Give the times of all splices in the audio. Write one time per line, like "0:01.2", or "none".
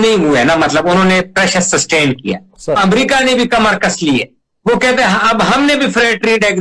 0:02.8

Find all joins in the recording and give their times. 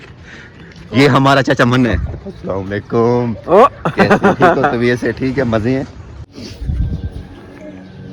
0:06.2

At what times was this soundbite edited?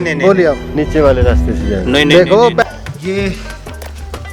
0:02.6

